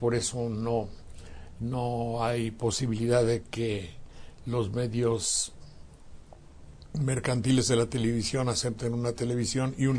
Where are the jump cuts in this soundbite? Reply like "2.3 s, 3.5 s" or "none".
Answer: none